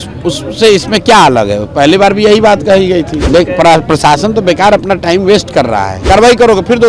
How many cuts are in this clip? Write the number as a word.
two